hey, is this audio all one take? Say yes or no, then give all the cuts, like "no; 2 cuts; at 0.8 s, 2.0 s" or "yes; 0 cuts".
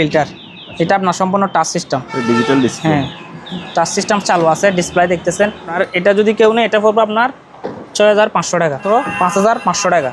no; 2 cuts; at 5.7 s, 8.8 s